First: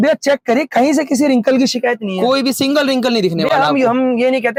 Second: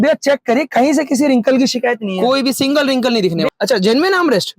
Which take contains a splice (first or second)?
second